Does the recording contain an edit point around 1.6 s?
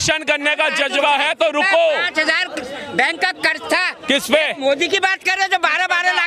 no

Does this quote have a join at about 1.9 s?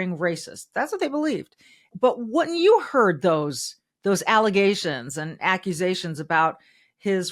yes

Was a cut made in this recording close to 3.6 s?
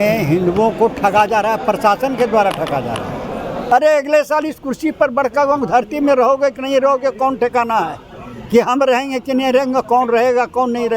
yes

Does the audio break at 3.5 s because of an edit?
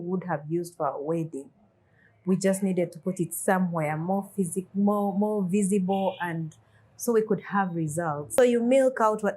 no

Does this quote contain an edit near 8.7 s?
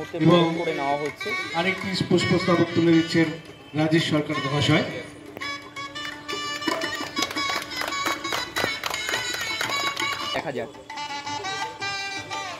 no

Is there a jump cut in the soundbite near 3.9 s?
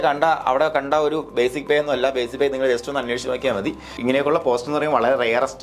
yes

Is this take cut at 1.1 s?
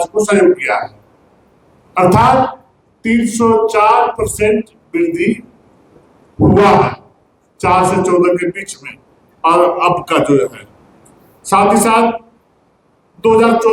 no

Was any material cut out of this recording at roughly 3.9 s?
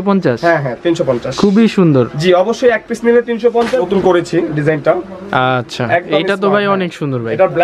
yes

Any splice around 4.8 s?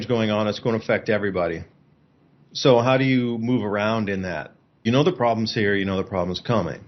yes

